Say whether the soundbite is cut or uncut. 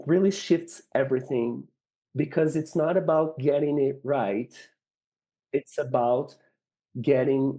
uncut